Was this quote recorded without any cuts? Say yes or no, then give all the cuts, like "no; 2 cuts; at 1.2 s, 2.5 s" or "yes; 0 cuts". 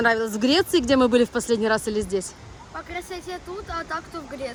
yes; 0 cuts